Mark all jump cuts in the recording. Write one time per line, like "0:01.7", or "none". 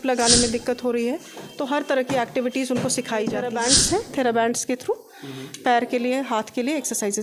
0:03.5